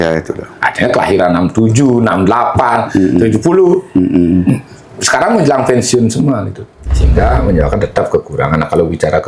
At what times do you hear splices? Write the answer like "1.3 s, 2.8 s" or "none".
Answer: 6.8 s